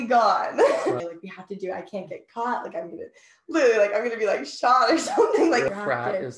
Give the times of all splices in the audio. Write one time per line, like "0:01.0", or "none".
0:01.0
0:05.7